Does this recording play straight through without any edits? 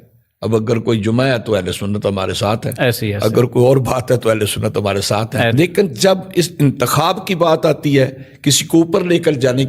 no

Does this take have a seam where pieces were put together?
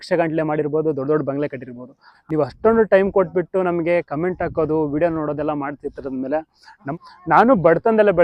yes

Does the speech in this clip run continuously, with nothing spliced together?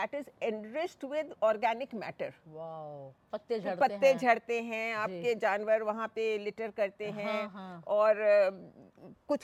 yes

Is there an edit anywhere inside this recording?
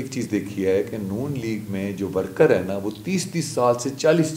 no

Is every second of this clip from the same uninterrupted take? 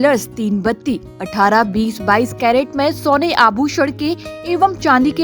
yes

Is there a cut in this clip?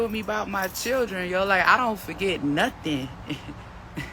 no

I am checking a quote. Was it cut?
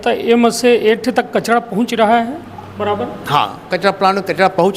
no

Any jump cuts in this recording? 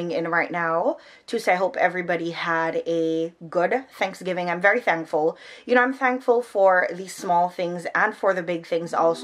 no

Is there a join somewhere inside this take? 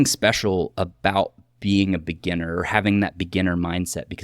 no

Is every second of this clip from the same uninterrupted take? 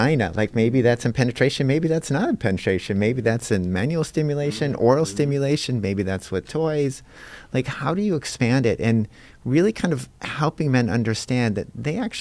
yes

